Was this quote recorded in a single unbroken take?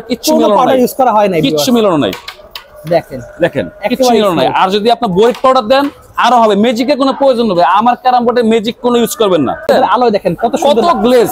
no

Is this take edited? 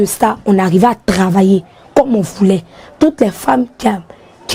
no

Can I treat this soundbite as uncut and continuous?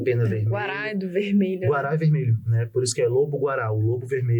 yes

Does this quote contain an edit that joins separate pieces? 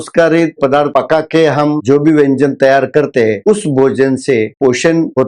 yes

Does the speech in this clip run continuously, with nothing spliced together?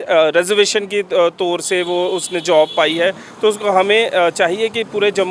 yes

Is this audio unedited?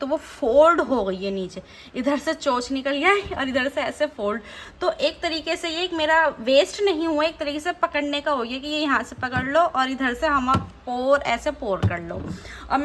yes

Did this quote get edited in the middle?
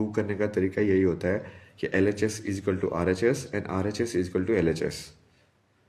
no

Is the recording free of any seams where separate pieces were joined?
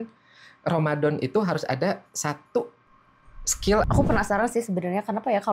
no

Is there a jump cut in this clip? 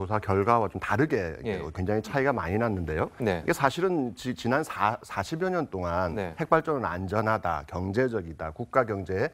no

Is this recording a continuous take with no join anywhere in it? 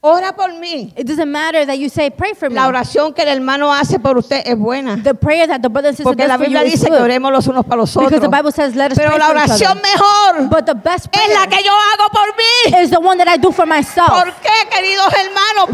yes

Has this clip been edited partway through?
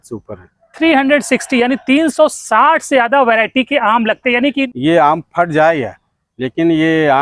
yes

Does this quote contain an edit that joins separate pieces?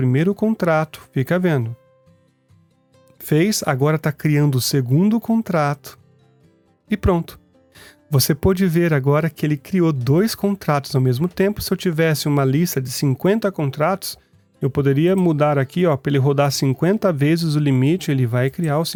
no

